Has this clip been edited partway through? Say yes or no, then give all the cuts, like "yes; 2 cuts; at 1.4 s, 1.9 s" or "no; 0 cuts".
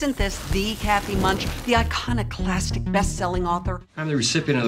yes; 1 cut; at 3.7 s